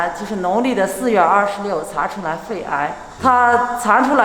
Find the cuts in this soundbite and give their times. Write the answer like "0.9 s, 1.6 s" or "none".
3.1 s